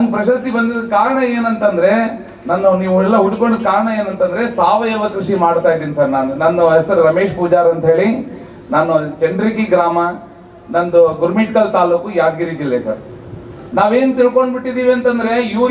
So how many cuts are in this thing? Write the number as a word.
one